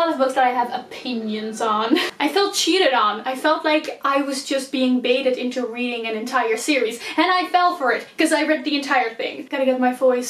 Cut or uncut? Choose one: cut